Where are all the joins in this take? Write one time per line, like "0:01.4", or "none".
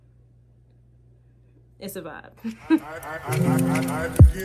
0:03.0